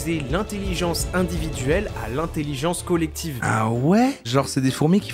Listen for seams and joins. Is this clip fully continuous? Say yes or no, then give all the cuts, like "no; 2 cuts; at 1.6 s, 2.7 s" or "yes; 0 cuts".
no; 1 cut; at 3.4 s